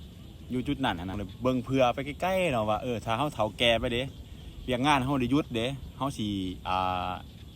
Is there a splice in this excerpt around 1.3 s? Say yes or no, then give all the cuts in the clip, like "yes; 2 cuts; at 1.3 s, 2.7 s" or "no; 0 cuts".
yes; 1 cut; at 1.3 s